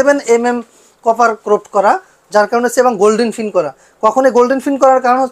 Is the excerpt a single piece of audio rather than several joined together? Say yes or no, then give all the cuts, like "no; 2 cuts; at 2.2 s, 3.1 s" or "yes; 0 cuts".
yes; 0 cuts